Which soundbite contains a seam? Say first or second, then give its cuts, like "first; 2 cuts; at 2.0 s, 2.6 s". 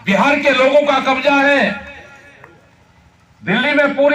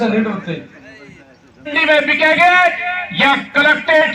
second; 1 cut; at 1.8 s